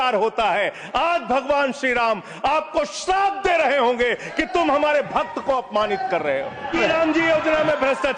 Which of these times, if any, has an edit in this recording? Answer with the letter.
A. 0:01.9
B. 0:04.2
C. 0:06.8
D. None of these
C